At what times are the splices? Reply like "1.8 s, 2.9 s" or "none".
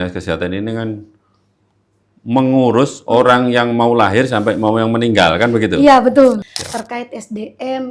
6.4 s